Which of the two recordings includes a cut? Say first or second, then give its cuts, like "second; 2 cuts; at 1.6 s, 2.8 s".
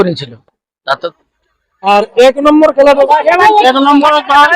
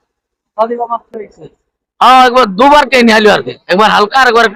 first; 1 cut; at 1.0 s